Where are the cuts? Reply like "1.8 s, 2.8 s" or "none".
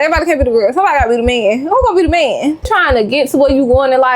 2.7 s